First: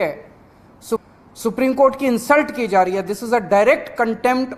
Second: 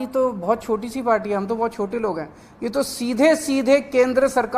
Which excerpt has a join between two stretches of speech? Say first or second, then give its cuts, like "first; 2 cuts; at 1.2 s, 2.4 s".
first; 1 cut; at 1.0 s